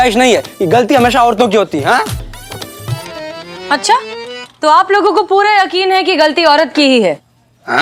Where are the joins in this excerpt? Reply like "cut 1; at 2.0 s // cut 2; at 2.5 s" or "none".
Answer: none

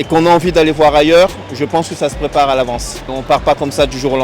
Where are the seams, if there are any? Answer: cut 1; at 3.1 s

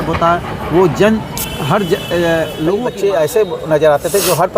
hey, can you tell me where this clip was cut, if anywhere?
cut 1; at 2.8 s

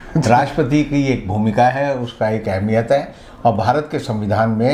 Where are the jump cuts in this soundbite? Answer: none

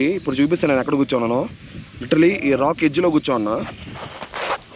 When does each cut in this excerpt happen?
none

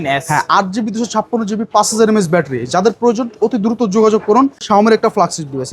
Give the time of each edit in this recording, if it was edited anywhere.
cut 1; at 4.6 s

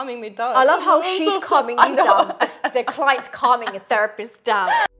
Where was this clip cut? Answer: none

